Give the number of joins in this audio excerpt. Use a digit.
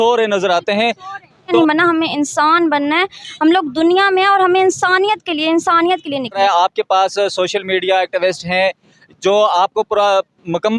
2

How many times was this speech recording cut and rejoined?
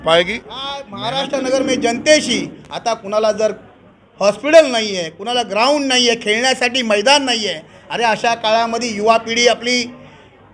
1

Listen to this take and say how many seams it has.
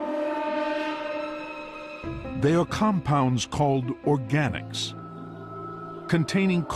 1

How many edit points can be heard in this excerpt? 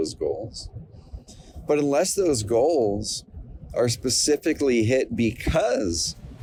0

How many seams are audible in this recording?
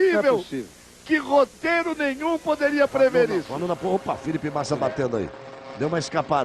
1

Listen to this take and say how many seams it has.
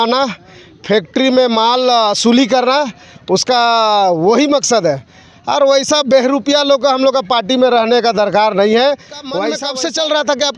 1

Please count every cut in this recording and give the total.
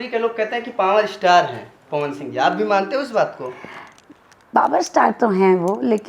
0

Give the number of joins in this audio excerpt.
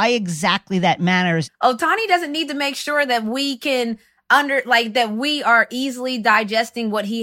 1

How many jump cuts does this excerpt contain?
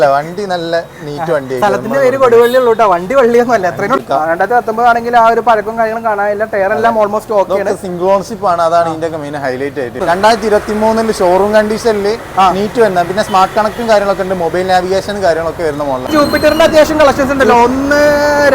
3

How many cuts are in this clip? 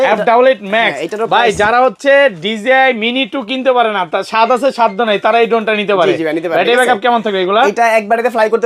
0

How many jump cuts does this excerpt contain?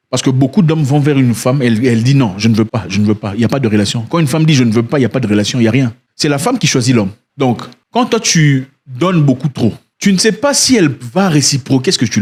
0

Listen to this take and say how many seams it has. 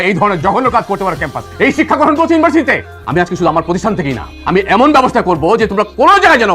1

